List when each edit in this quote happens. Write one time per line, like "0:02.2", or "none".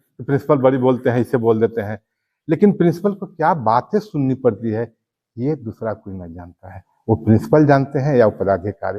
none